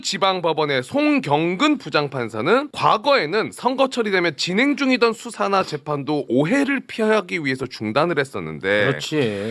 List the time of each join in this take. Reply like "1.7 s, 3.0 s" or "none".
2.7 s